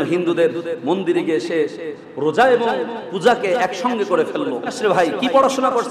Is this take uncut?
no; 1 cut; at 4.8 s

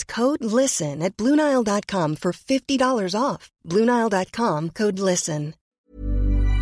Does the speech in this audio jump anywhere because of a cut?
yes; 1 cut; at 5.6 s

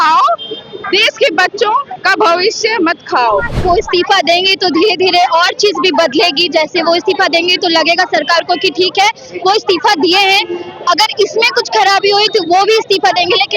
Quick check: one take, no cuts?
no; 1 cut; at 3.6 s

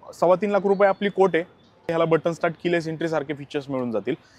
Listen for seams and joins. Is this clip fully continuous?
no; 1 cut; at 1.9 s

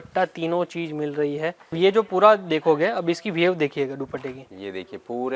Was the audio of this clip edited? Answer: yes; 1 cut; at 1.7 s

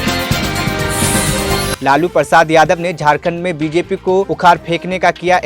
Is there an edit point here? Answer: yes; 1 cut; at 1.8 s

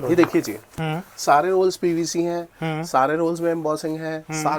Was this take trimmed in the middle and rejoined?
no; 0 cuts

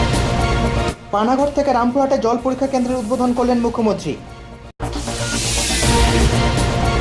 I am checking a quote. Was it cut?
no; 0 cuts

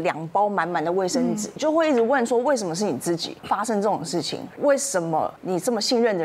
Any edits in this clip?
yes; 4 cuts; at 1.6 s, 3.3 s, 4.4 s, 5.4 s

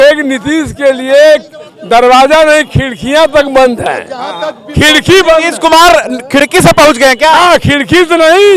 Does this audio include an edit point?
no; 0 cuts

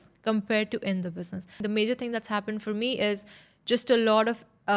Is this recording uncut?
no; 1 cut; at 1.6 s

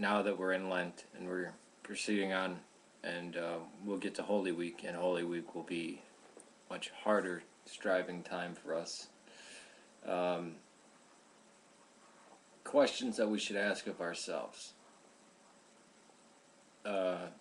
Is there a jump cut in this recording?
no; 0 cuts

